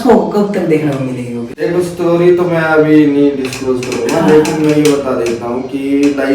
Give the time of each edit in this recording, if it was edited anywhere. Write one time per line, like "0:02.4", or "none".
0:01.5